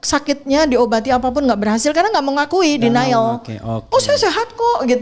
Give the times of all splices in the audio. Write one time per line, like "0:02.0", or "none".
none